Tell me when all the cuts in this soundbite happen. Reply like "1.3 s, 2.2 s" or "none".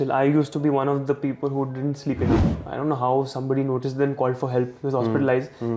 2.5 s